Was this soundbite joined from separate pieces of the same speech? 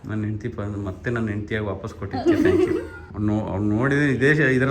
yes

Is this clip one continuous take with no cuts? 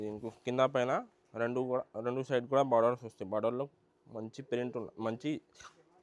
yes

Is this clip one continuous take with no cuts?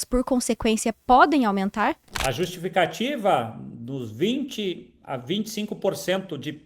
no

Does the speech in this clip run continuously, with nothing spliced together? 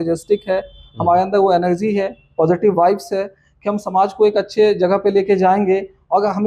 yes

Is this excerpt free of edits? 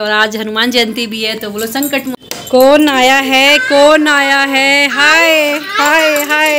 no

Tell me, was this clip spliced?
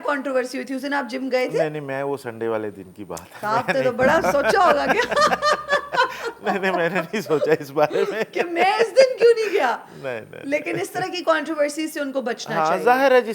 no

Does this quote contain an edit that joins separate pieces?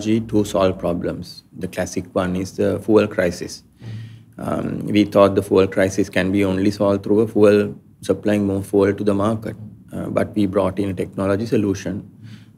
no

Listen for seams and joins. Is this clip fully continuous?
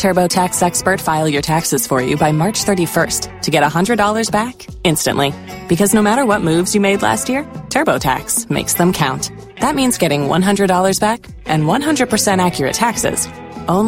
yes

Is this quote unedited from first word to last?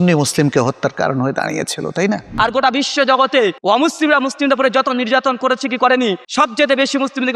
no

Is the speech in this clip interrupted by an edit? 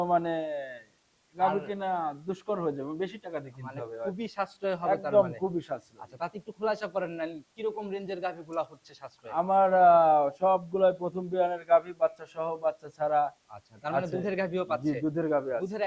no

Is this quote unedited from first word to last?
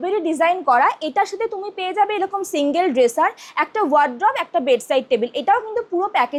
yes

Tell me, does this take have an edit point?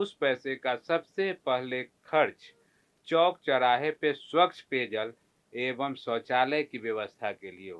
no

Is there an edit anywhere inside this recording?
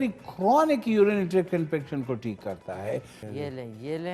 yes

